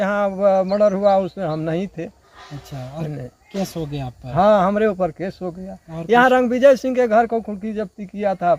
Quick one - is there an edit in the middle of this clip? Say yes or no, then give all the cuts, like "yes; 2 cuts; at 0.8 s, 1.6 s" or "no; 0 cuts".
no; 0 cuts